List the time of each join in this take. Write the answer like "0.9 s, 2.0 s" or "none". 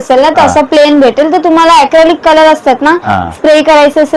none